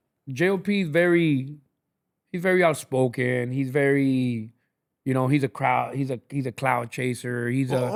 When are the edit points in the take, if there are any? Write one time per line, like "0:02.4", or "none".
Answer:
none